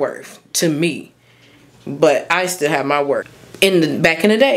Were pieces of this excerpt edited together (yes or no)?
yes